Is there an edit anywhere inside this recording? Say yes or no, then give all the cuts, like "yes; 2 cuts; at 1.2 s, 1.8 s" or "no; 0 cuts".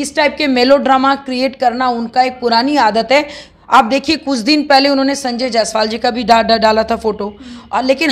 no; 0 cuts